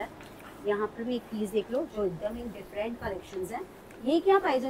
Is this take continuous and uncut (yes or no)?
yes